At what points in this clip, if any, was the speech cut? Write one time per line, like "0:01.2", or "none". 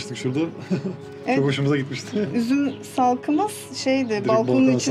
none